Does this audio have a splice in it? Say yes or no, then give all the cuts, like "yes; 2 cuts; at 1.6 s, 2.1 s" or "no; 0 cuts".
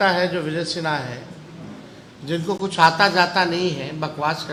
no; 0 cuts